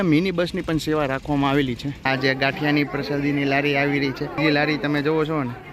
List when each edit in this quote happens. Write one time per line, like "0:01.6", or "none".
0:01.9
0:04.4